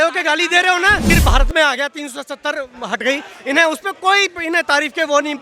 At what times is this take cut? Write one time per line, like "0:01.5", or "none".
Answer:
0:01.1

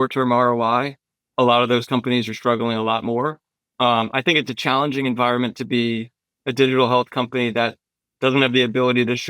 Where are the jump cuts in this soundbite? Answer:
none

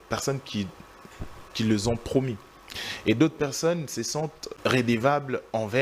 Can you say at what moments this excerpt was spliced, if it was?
0:02.7
0:04.6

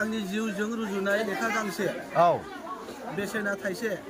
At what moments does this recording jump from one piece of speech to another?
none

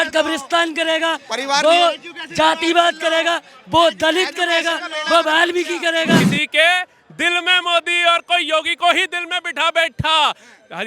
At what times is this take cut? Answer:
0:06.4

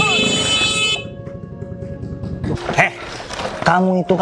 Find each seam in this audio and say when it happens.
0:02.6

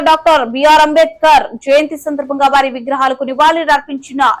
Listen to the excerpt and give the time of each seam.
none

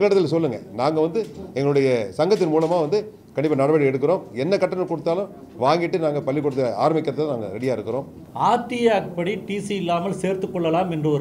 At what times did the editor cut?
0:08.2

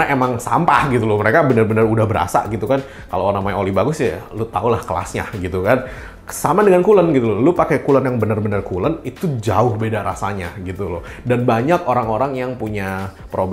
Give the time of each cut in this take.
none

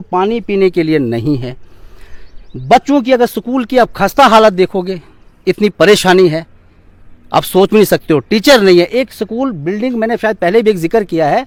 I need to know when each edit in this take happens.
none

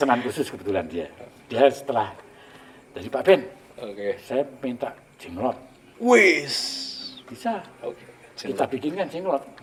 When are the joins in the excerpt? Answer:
none

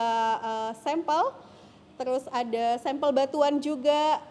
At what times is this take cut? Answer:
none

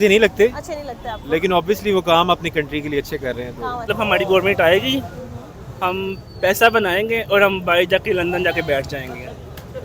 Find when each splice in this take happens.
0:03.9

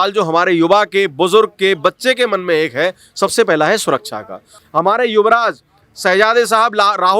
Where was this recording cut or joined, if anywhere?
0:04.5

